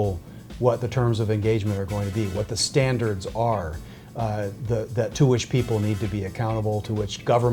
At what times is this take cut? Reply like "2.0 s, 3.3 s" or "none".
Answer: none